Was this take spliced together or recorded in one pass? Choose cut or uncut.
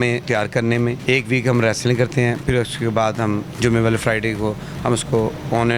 uncut